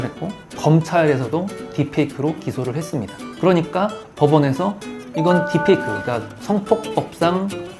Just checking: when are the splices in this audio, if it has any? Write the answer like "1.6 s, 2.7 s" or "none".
none